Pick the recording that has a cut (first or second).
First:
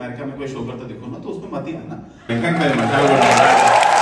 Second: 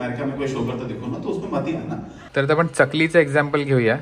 second